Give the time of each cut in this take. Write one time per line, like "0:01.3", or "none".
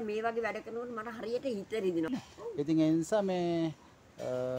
0:02.1

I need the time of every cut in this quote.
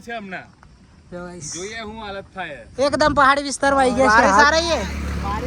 0:04.4

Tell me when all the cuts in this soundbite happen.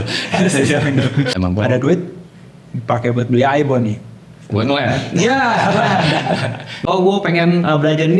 0:01.3
0:06.8

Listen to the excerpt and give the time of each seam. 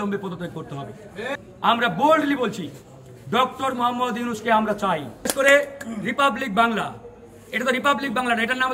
0:01.3
0:05.2

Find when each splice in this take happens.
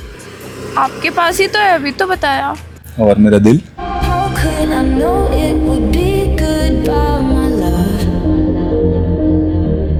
none

